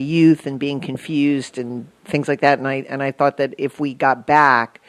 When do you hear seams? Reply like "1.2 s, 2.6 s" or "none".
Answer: none